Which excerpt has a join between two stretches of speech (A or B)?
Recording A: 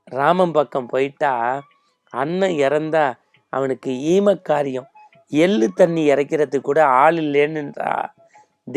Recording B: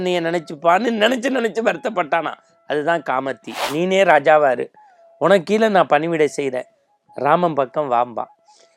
B